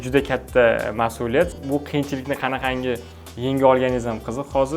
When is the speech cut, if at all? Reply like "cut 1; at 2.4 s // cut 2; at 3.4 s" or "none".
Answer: cut 1; at 1.5 s